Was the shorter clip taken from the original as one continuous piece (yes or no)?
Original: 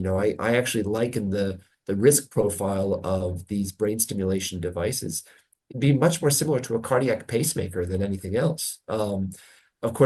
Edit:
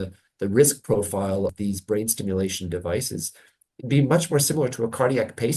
no